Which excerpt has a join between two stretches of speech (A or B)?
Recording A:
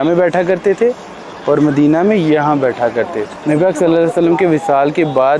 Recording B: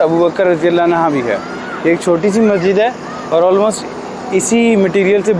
A